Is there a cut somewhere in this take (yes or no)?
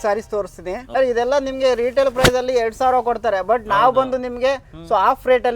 yes